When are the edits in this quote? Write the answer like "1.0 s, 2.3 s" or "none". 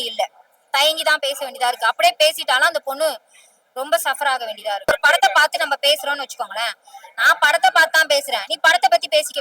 4.9 s

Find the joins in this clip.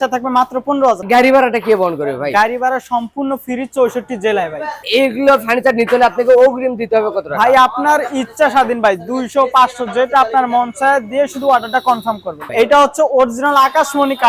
1.0 s, 4.8 s, 12.3 s

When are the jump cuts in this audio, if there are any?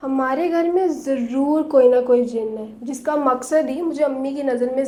none

